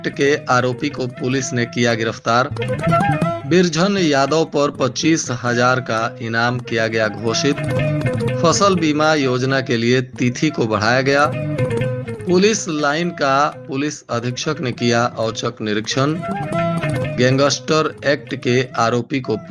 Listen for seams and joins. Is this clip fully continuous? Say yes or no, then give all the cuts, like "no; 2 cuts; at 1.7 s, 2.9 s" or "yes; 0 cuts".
yes; 0 cuts